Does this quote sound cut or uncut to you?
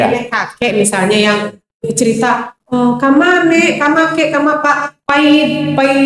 uncut